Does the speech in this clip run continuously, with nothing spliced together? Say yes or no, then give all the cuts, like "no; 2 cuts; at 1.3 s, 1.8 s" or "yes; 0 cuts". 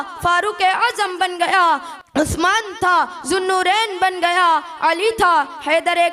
no; 1 cut; at 2.0 s